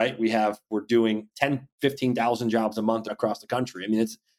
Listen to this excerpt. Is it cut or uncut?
cut